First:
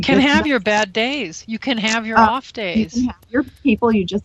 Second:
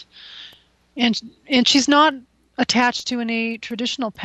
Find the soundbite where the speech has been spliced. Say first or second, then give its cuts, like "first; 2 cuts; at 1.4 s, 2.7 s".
first; 1 cut; at 2.2 s